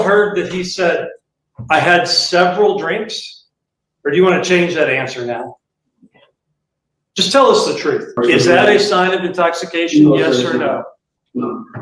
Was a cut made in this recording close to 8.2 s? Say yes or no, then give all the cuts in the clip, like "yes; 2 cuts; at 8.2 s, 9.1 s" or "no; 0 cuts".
yes; 1 cut; at 8.2 s